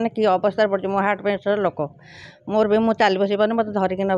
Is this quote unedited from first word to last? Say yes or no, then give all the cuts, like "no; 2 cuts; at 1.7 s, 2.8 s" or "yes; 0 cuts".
yes; 0 cuts